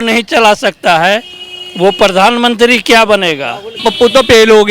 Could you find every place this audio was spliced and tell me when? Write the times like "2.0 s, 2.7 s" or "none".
3.8 s